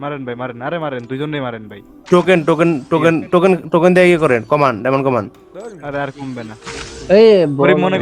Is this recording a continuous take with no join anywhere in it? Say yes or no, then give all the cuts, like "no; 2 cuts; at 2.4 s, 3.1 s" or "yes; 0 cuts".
yes; 0 cuts